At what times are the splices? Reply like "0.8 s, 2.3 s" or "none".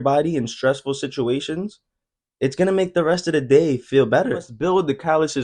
4.5 s